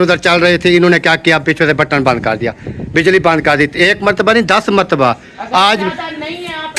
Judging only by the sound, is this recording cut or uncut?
uncut